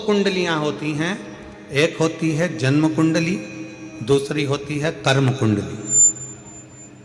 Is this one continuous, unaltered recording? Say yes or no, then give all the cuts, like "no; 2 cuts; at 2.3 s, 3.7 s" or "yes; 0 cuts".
yes; 0 cuts